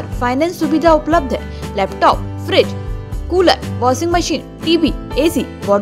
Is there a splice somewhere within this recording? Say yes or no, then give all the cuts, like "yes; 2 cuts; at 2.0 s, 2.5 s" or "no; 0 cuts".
no; 0 cuts